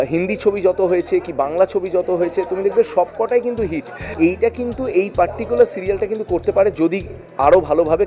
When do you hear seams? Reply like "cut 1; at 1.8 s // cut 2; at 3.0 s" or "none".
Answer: cut 1; at 4.0 s